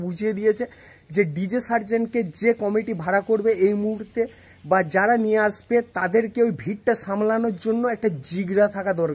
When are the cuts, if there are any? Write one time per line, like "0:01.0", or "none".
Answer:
none